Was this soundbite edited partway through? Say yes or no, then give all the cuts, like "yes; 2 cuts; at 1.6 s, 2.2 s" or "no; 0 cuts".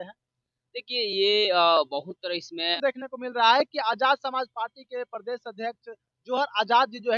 yes; 1 cut; at 2.8 s